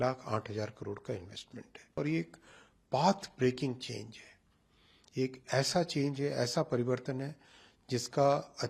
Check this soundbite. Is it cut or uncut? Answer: cut